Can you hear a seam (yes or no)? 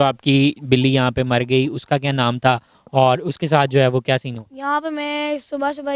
yes